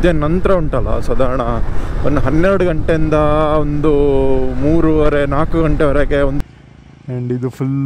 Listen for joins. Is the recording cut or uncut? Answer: cut